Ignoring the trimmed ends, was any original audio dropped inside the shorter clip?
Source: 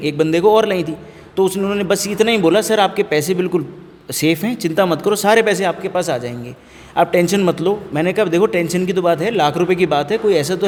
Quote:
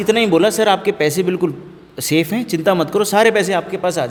no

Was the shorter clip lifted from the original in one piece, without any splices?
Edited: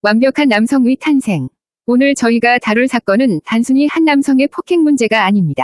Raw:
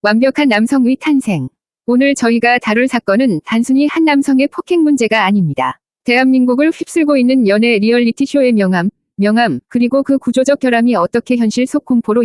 yes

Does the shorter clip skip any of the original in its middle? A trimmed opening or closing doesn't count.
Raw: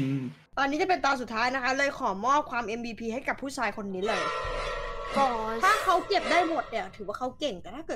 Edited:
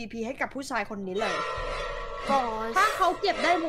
no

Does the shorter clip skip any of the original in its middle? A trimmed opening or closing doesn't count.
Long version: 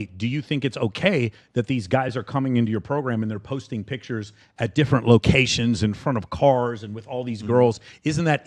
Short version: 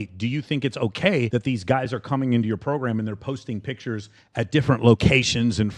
yes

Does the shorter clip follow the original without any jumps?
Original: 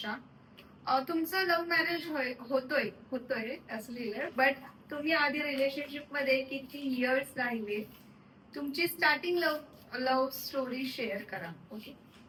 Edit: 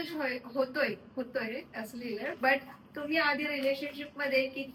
yes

